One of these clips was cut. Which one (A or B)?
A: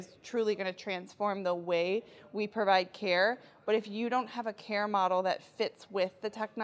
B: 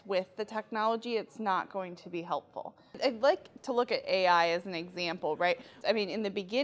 B